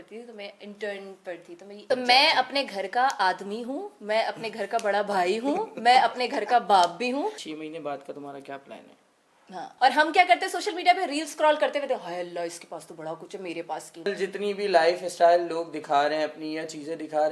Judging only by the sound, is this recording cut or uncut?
cut